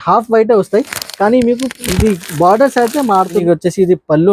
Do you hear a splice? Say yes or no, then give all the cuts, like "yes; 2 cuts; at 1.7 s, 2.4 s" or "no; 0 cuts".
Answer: yes; 1 cut; at 3.4 s